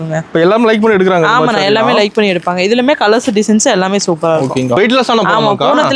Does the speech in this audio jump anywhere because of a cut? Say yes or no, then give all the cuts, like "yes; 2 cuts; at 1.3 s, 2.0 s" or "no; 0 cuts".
yes; 1 cut; at 4.8 s